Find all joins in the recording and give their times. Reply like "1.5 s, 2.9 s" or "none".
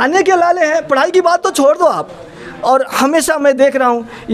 none